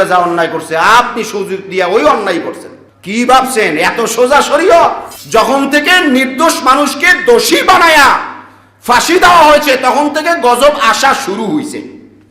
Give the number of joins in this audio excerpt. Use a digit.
1